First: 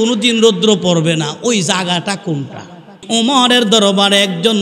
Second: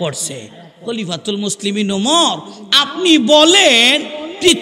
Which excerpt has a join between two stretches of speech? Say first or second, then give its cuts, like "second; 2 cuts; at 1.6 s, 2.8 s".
first; 1 cut; at 3.0 s